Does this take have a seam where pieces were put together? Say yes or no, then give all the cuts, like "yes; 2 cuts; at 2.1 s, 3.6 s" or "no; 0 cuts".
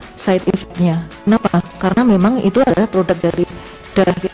no; 0 cuts